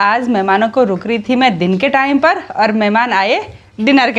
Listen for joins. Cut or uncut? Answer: uncut